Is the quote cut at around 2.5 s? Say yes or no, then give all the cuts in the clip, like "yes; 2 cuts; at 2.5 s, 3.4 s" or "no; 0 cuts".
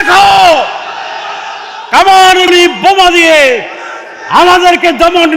yes; 1 cut; at 2.5 s